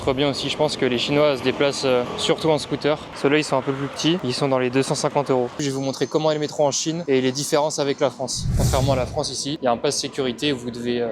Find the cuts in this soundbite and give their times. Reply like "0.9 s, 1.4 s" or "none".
2.1 s, 3.1 s, 5.6 s, 8.4 s